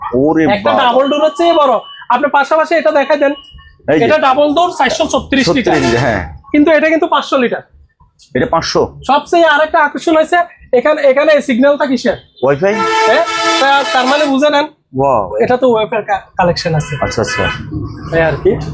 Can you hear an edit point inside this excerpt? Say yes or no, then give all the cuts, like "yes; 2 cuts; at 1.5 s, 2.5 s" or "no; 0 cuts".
no; 0 cuts